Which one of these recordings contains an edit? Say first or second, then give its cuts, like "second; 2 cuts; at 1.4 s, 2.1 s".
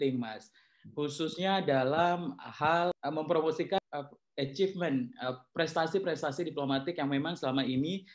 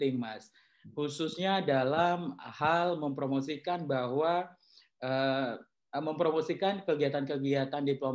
first; 2 cuts; at 3.0 s, 3.8 s